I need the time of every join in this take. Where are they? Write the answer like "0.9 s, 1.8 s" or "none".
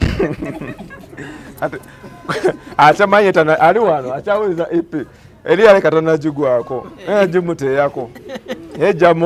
none